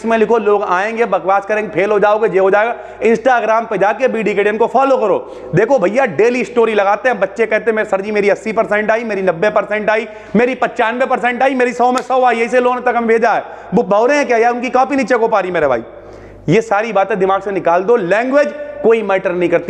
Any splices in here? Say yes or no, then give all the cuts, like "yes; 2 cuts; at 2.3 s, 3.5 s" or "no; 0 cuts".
no; 0 cuts